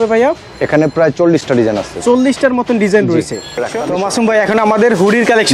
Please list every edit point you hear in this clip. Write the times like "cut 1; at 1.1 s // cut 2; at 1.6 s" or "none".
cut 1; at 3.6 s